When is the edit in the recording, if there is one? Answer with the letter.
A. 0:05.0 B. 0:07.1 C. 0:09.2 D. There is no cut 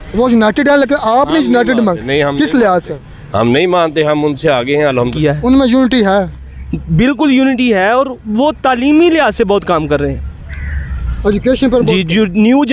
A